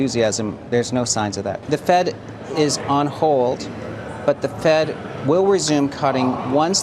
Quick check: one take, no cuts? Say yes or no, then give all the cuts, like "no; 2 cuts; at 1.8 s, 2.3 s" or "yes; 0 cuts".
no; 1 cut; at 1.6 s